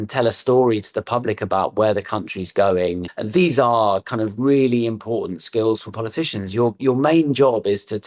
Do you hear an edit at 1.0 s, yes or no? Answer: no